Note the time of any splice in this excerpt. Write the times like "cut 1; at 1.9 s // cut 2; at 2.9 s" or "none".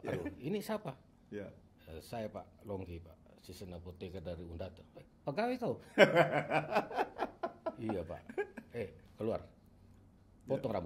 none